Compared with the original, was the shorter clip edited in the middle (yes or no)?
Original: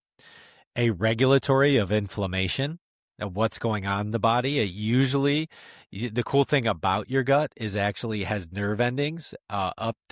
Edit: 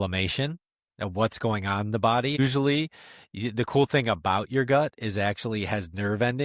yes